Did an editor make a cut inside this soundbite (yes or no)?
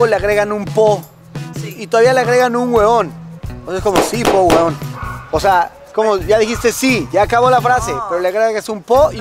no